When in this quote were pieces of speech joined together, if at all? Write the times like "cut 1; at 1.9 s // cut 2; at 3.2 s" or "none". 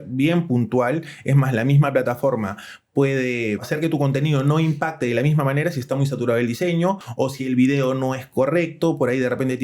cut 1; at 3.7 s // cut 2; at 7.1 s